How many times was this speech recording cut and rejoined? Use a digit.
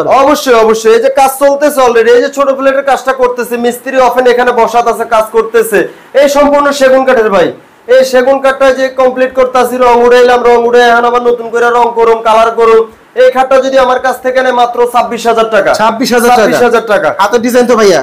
0